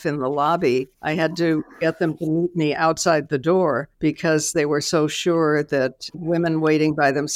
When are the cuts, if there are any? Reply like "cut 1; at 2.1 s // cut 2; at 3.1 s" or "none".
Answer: cut 1; at 1.0 s // cut 2; at 3.9 s

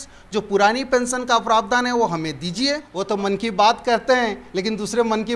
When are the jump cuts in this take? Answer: cut 1; at 2.9 s

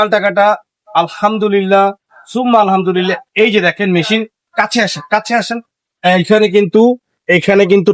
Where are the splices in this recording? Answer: none

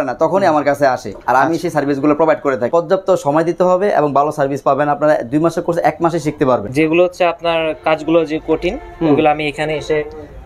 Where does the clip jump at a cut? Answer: cut 1; at 2.7 s // cut 2; at 6.7 s

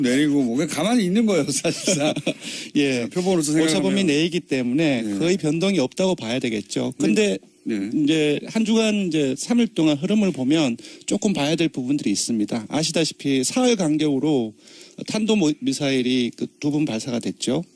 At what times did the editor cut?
cut 1; at 2.5 s

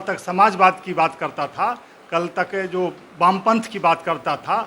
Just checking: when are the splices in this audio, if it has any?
none

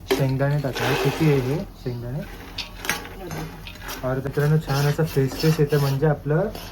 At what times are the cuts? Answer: cut 1; at 4.3 s

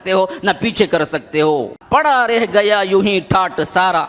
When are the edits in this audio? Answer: cut 1; at 1.8 s

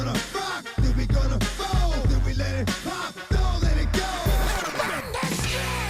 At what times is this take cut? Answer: none

